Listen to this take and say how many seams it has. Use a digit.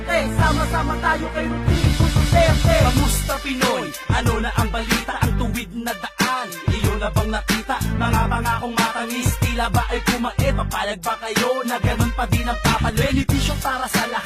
1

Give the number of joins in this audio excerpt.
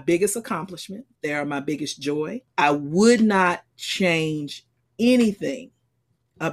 2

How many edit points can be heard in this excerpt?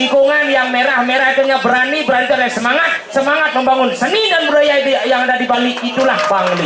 0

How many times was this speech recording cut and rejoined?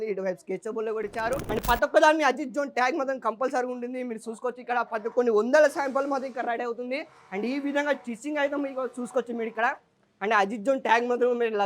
1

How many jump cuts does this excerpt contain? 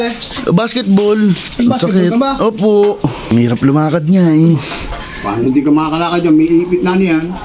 2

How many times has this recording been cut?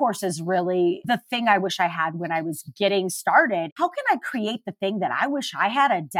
3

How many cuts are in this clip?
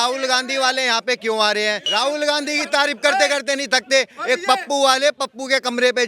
1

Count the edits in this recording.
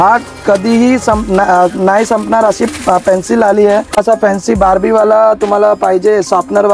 1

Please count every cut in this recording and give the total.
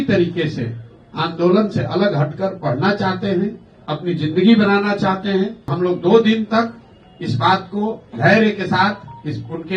1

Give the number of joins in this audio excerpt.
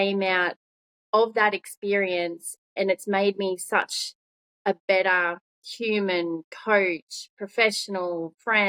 0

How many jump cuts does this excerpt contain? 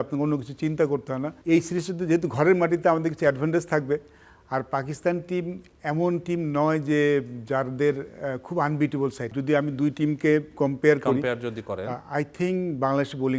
2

